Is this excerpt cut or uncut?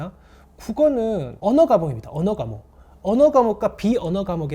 cut